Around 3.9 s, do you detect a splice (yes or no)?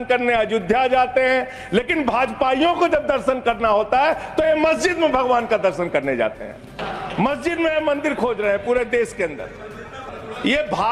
no